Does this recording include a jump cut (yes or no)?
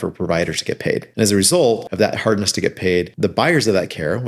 yes